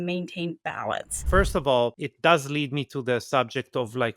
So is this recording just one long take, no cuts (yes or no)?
no